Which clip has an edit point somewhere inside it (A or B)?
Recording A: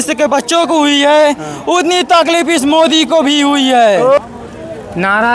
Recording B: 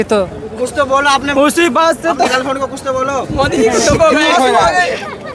A